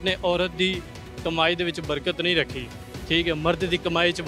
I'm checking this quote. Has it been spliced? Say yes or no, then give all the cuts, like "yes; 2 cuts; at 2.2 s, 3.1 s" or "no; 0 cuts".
no; 0 cuts